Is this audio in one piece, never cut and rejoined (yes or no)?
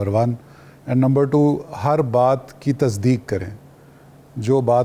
yes